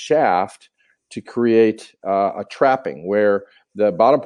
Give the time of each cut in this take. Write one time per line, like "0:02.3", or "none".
none